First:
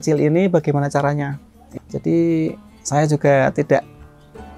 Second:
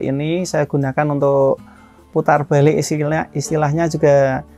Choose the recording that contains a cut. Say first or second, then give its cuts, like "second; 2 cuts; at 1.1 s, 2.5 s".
first; 1 cut; at 1.7 s